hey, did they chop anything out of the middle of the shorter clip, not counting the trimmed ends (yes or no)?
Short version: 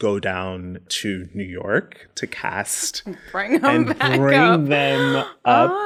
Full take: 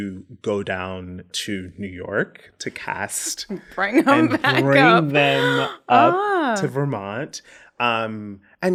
no